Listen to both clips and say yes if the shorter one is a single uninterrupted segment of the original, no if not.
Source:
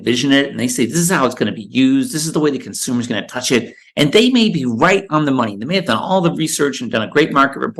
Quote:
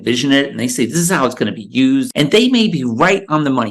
no